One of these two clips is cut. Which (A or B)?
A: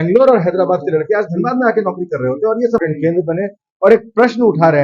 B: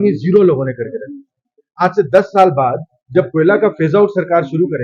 A